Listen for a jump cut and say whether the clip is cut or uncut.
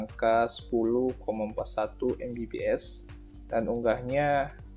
uncut